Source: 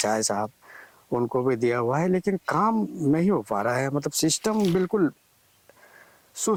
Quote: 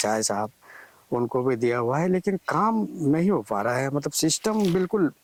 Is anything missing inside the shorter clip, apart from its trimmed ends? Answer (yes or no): no